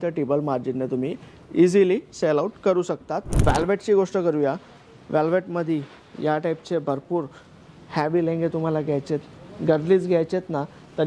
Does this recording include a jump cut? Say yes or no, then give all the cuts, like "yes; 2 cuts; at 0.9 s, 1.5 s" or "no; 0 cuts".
yes; 1 cut; at 3.4 s